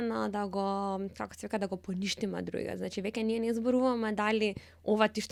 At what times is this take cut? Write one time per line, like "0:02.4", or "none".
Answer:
none